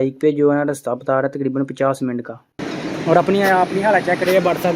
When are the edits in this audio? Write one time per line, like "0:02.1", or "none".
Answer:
0:02.6